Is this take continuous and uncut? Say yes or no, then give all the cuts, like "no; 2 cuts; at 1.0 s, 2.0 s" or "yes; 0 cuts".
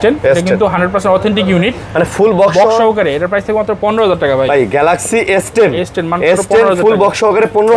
yes; 0 cuts